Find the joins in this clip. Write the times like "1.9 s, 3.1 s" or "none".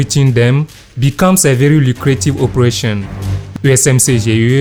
none